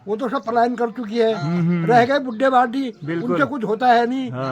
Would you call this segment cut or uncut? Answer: uncut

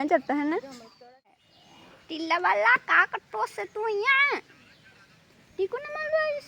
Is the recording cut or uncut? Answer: cut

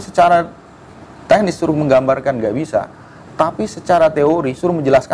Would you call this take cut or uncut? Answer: uncut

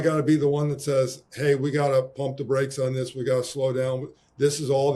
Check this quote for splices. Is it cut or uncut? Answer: uncut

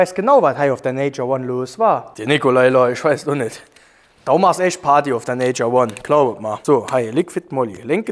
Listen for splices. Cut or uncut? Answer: uncut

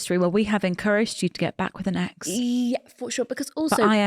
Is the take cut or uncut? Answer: uncut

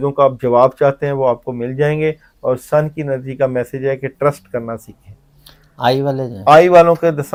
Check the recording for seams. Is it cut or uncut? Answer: uncut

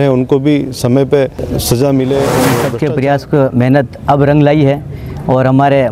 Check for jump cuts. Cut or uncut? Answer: cut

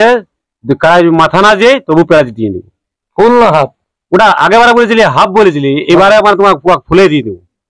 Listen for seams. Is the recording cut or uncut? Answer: uncut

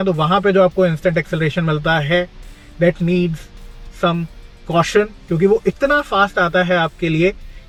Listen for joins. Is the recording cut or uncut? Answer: uncut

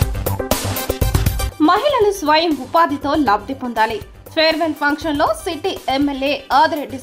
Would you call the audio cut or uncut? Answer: cut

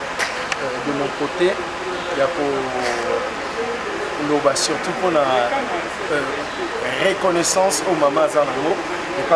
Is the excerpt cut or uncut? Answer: uncut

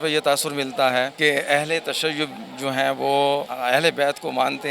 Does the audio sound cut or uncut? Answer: cut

